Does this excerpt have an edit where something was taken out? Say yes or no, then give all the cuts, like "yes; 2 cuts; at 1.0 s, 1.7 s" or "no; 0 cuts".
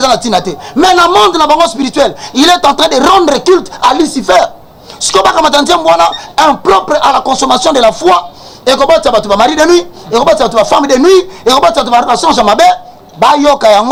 no; 0 cuts